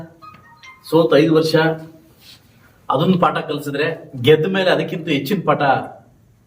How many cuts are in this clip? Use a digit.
1